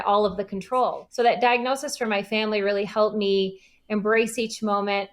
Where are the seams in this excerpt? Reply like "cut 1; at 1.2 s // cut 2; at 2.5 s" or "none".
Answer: cut 1; at 1.0 s